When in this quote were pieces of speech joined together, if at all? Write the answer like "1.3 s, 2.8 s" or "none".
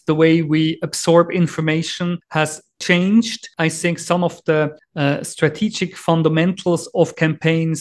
2.2 s, 3.4 s, 4.8 s